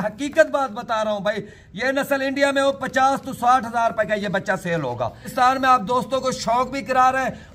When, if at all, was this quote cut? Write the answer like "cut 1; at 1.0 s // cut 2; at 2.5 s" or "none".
cut 1; at 5.2 s